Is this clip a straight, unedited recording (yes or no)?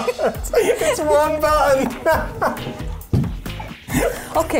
yes